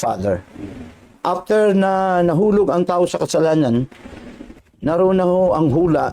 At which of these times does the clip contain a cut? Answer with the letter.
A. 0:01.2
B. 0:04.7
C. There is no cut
A